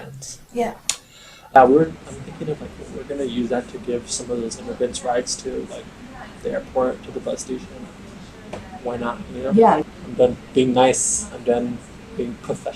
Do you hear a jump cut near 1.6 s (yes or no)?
yes